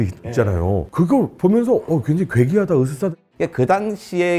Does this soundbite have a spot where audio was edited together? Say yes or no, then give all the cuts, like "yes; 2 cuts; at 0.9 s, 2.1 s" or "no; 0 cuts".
yes; 1 cut; at 3.1 s